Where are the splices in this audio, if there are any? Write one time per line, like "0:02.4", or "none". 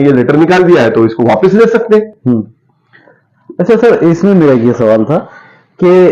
none